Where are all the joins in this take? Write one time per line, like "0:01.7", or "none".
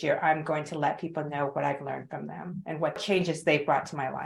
0:03.0